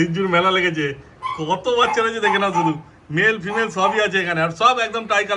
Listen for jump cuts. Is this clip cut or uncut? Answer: uncut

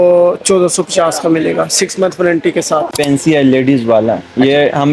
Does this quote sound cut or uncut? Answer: cut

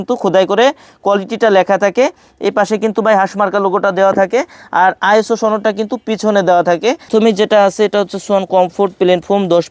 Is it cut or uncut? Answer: cut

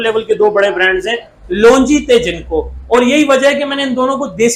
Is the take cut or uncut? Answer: uncut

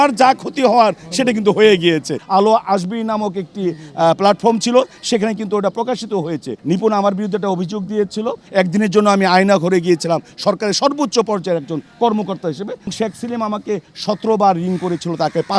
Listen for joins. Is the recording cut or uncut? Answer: cut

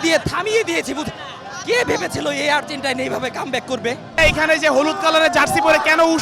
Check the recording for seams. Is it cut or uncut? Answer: cut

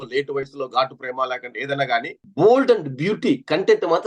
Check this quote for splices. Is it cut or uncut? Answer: cut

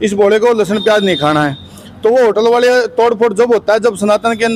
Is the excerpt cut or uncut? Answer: uncut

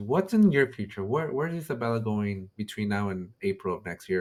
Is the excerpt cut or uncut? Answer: uncut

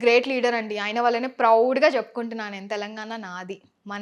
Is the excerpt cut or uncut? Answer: uncut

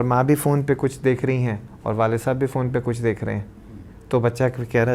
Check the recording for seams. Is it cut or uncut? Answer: uncut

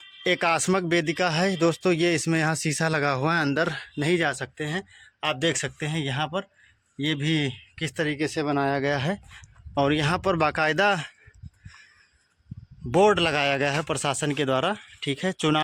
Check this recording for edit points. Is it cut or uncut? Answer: uncut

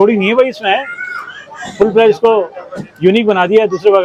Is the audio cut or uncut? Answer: uncut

